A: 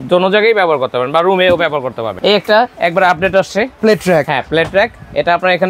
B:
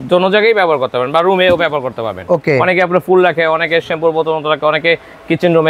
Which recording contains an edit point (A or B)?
A